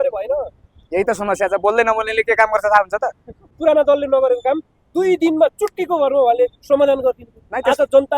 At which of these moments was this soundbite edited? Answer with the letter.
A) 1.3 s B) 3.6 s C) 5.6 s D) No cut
B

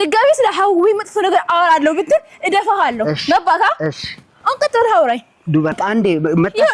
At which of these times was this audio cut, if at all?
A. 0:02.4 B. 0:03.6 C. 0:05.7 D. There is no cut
C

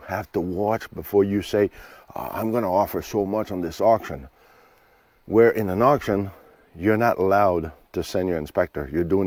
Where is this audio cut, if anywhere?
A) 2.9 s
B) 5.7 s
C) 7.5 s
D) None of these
D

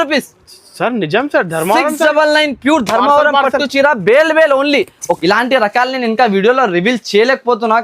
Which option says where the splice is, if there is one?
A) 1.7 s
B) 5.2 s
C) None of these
B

